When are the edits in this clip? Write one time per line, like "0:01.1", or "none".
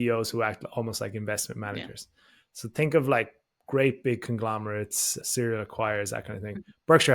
0:05.1